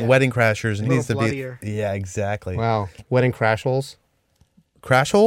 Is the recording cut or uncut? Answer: cut